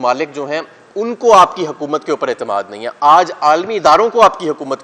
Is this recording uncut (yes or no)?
yes